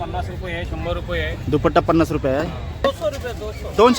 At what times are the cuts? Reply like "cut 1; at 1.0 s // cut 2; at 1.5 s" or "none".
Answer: cut 1; at 2.9 s